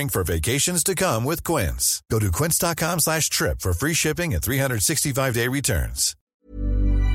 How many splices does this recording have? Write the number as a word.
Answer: one